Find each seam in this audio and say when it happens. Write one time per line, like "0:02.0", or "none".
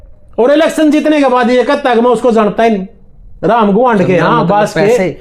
none